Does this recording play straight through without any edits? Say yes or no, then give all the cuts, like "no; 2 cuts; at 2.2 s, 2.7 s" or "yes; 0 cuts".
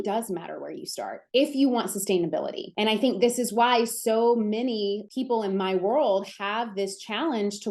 yes; 0 cuts